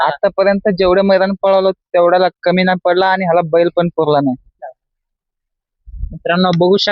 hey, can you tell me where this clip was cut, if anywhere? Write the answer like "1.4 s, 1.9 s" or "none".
4.6 s